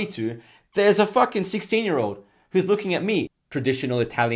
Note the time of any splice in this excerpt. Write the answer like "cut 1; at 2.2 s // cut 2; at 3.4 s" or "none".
cut 1; at 3.4 s